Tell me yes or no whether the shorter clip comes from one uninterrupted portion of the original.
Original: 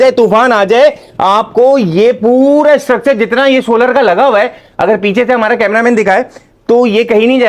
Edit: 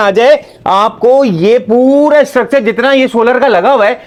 yes